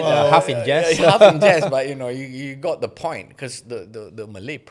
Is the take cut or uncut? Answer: uncut